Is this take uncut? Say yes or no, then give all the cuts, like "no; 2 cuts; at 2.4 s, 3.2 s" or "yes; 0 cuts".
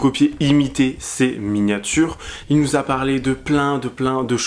no; 1 cut; at 2.3 s